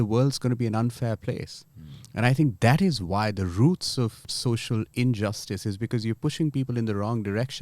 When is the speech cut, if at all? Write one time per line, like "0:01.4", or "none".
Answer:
0:04.3